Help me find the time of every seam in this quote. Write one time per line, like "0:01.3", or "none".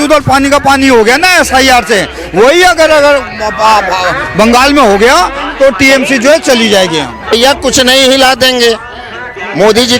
0:07.3